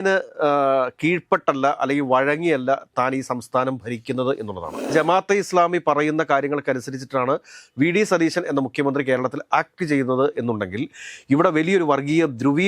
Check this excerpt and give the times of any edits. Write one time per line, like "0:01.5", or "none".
0:04.9